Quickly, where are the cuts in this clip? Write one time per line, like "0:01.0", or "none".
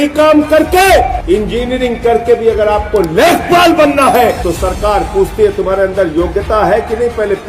0:01.2
0:04.4